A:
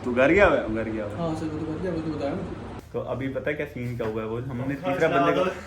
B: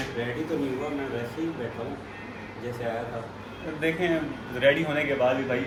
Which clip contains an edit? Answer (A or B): A